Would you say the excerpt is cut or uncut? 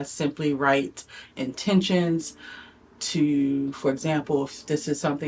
uncut